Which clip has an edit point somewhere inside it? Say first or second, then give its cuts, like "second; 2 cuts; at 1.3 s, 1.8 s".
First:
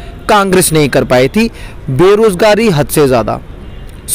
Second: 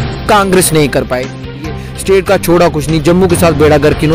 second; 1 cut; at 1.9 s